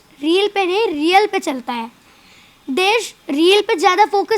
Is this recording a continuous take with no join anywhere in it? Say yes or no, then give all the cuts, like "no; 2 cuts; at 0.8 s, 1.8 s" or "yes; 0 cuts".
yes; 0 cuts